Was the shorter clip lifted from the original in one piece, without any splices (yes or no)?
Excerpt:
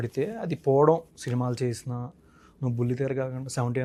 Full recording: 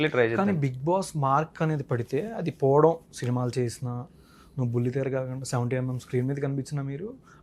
yes